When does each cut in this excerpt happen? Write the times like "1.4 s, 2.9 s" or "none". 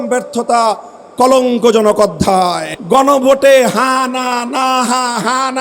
2.7 s